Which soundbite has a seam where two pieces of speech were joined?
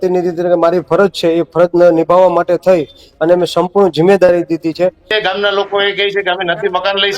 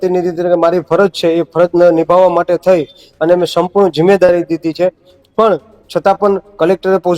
first; 1 cut; at 5.1 s

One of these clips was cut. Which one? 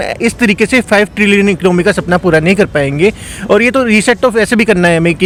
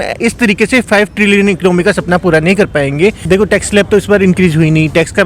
second; 1 cut; at 3.2 s

